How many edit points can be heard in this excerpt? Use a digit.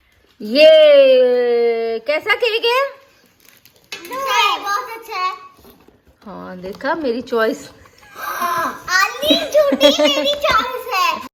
0